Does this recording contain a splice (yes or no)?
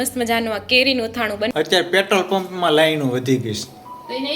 yes